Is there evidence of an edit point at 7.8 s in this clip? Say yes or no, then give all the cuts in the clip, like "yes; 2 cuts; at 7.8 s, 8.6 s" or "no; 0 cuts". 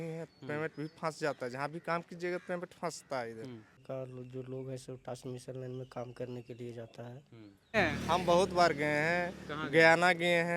yes; 2 cuts; at 3.8 s, 7.8 s